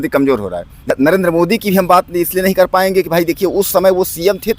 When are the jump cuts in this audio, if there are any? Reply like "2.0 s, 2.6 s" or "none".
0.9 s